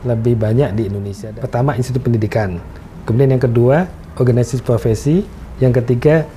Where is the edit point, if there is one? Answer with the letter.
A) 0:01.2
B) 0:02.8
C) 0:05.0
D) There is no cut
A